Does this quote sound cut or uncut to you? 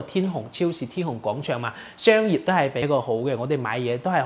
cut